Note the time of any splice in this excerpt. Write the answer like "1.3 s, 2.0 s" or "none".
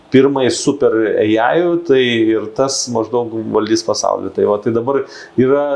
none